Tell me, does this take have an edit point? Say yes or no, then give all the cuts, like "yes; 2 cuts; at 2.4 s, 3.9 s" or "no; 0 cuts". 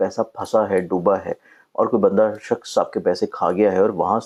no; 0 cuts